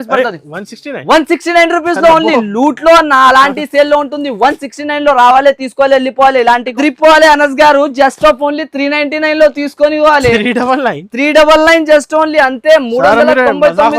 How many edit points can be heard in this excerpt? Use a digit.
1